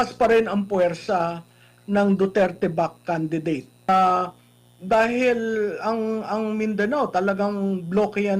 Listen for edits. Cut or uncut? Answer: cut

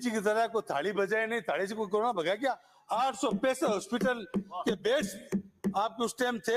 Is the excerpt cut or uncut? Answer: cut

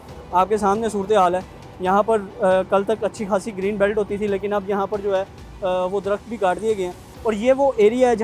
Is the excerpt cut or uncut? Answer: uncut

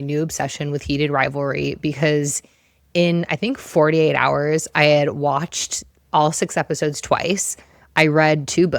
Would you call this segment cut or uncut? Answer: uncut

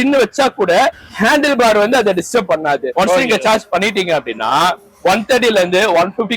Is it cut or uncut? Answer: cut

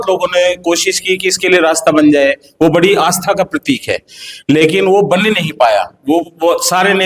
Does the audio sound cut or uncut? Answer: uncut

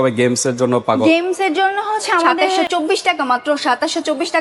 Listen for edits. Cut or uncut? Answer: cut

